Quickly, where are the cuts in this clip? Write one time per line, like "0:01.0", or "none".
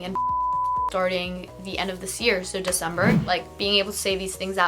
0:03.2